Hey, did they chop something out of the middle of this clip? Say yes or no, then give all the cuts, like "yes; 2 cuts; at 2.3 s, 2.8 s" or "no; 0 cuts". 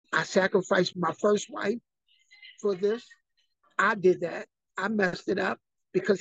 yes; 1 cut; at 0.9 s